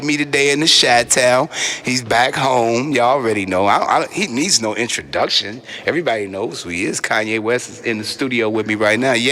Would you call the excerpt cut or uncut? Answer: cut